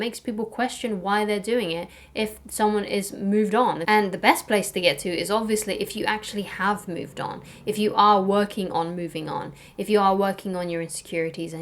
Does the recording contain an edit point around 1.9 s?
no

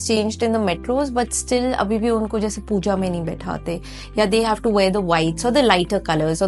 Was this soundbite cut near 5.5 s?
no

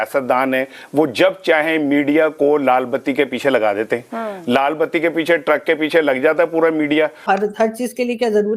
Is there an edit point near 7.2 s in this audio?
yes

